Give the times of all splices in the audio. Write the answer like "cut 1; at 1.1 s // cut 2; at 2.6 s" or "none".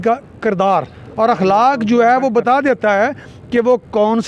none